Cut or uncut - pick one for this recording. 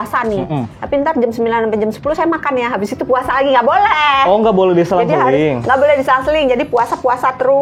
uncut